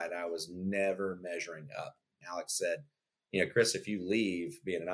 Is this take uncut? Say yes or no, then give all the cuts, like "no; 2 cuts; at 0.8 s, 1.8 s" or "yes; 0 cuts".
no; 1 cut; at 2.1 s